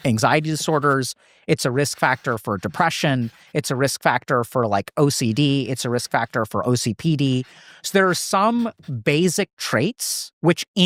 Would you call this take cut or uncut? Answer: uncut